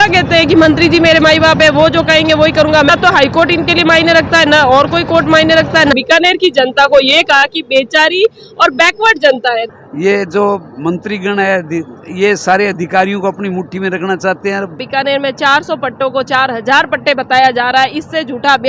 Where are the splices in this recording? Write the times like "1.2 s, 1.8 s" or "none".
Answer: 2.9 s, 5.9 s, 9.7 s, 14.8 s